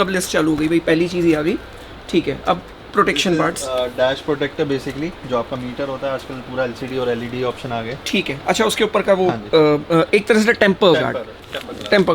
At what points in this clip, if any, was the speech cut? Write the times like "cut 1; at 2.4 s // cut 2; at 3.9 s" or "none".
none